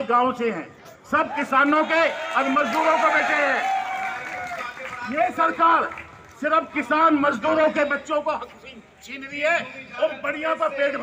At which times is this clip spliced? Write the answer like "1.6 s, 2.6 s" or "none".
none